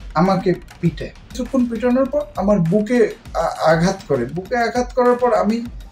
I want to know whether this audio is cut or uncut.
cut